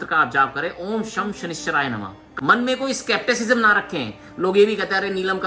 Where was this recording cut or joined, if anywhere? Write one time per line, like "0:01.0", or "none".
0:02.2